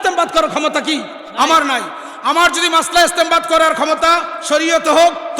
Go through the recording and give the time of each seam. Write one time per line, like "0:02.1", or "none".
none